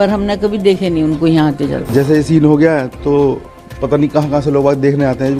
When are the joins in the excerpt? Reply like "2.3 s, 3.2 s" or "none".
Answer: 1.9 s